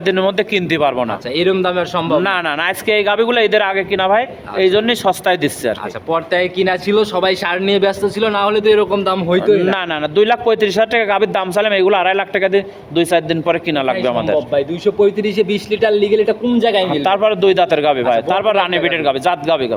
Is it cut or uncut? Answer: uncut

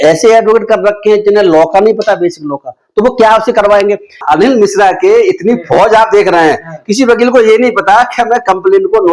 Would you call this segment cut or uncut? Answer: cut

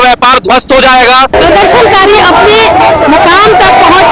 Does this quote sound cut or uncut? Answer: cut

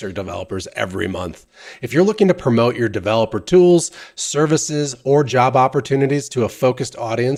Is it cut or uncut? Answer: uncut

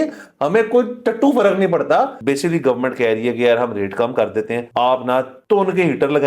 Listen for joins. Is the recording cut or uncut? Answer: cut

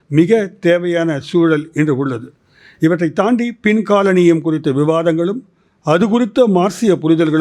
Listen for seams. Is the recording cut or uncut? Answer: uncut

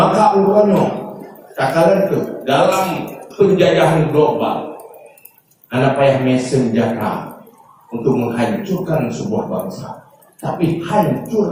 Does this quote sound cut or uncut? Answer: uncut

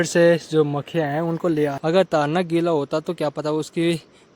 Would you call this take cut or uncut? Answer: cut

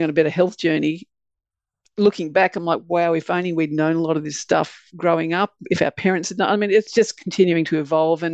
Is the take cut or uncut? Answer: cut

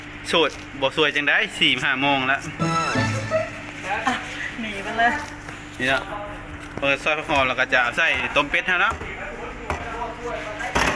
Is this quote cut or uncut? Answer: uncut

